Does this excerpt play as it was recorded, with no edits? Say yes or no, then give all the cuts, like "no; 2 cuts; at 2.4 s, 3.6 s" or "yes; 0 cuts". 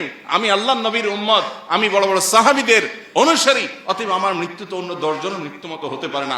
yes; 0 cuts